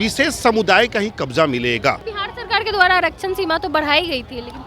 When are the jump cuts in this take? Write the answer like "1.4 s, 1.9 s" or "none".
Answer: 2.1 s